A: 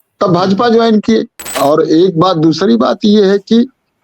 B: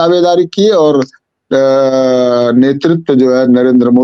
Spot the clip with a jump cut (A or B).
A